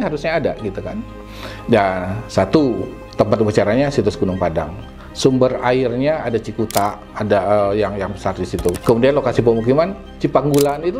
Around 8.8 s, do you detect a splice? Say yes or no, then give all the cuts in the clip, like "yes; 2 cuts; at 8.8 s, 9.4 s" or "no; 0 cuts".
yes; 1 cut; at 8.8 s